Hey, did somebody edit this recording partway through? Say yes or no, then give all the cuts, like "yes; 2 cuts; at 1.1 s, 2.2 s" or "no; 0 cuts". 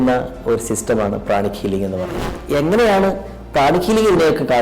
yes; 1 cut; at 2.3 s